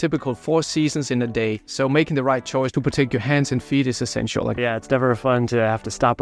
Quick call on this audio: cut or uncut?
cut